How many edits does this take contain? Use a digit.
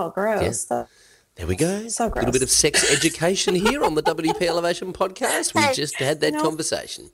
0